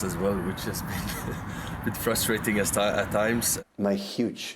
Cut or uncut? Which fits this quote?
cut